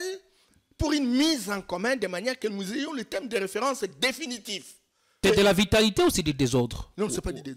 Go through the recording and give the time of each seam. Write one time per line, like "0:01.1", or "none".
0:05.2